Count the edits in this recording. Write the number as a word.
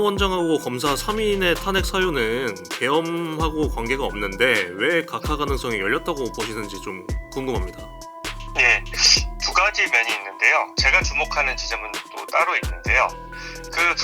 one